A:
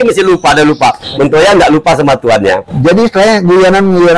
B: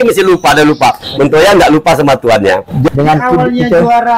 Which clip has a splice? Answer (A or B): B